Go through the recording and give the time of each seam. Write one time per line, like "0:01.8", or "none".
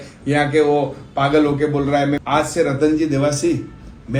0:02.2